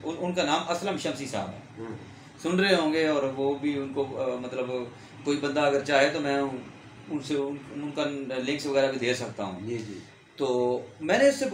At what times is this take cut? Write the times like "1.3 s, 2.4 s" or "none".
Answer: none